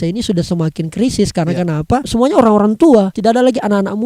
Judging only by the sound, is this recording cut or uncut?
cut